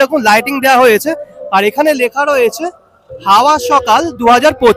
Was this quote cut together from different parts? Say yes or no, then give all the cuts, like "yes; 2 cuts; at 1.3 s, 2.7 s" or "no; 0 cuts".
no; 0 cuts